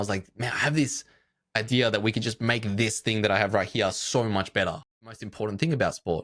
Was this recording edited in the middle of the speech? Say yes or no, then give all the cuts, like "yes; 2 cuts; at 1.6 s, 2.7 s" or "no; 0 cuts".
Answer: yes; 1 cut; at 5.3 s